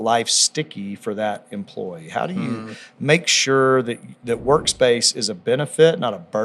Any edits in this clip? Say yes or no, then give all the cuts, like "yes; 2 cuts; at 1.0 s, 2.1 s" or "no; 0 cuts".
no; 0 cuts